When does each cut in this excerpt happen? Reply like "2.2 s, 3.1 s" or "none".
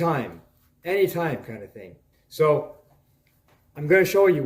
2.2 s